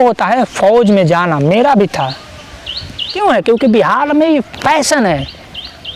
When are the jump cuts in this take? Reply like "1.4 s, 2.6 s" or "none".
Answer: 3.1 s